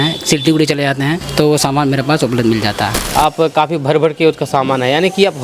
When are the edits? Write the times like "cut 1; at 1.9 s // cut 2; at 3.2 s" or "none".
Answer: cut 1; at 1.2 s // cut 2; at 3.0 s